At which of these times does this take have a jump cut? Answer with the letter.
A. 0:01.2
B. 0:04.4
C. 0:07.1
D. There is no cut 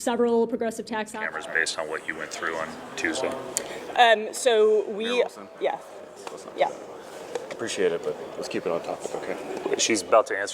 A